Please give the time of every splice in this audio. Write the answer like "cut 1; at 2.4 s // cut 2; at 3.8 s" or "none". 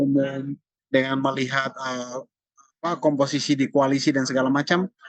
none